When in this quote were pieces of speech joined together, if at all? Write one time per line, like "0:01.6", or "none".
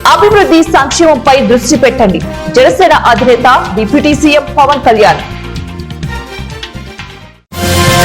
0:05.2